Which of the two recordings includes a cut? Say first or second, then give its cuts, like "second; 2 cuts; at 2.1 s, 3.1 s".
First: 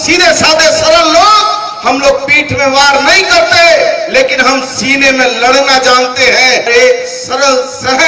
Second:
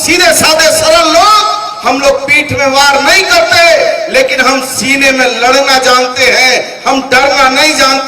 first; 1 cut; at 6.7 s